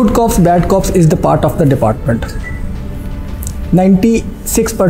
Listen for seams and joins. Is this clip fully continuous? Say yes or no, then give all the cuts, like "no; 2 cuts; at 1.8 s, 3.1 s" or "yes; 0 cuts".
yes; 0 cuts